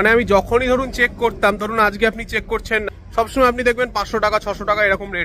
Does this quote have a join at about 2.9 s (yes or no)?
yes